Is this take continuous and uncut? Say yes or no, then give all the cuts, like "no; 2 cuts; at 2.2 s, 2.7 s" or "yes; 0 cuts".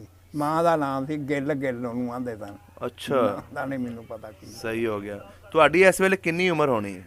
yes; 0 cuts